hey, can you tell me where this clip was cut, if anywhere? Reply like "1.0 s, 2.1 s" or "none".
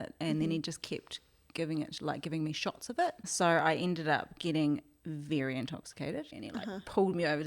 3.3 s, 6.4 s